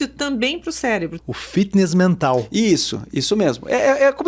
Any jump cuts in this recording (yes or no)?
yes